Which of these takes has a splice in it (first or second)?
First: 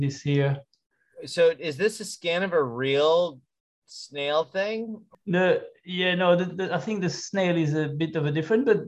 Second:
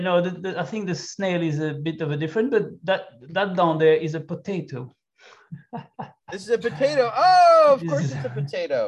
first